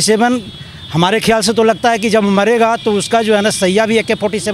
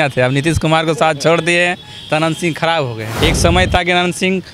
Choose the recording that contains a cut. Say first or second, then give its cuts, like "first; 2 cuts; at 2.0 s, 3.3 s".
second; 1 cut; at 3.0 s